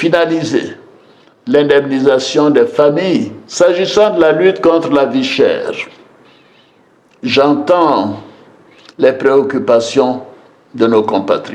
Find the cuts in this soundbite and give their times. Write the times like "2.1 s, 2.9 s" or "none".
3.4 s